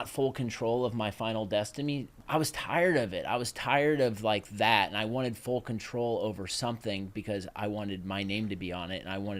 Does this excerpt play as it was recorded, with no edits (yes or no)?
no